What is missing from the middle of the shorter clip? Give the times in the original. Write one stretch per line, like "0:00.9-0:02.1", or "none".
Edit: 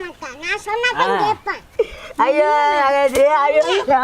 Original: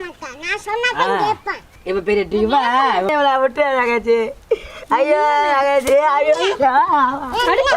0:01.6-0:04.4